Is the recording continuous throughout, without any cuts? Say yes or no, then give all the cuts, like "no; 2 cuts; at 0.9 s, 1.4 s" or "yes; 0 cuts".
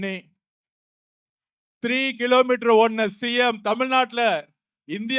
yes; 0 cuts